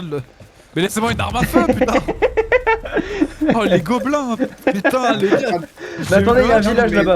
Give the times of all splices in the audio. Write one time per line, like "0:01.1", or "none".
none